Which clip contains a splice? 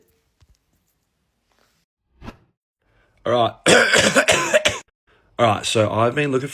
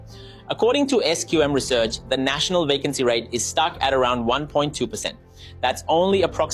first; 1 cut; at 2.1 s

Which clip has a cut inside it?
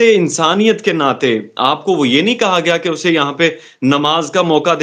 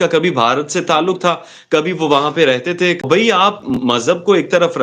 second; 1 cut; at 3.0 s

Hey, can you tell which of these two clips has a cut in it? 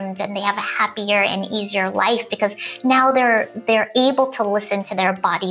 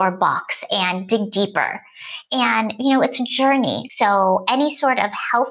second; 1 cut; at 3.8 s

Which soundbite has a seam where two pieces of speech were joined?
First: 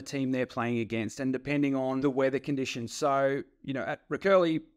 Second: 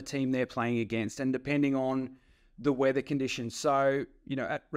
first; 1 cut; at 2.0 s

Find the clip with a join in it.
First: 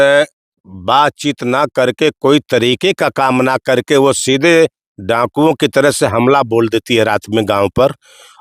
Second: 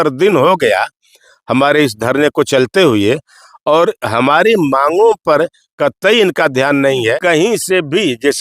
second; 1 cut; at 7.2 s

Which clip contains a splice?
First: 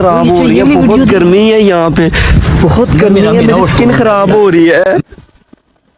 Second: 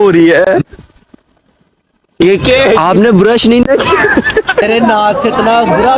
second; 1 cut; at 4.6 s

